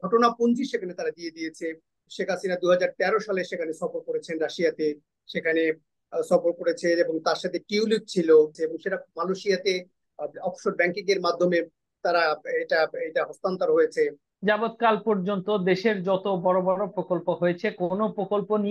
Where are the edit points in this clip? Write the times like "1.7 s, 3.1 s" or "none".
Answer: 2.1 s, 8.6 s, 14.3 s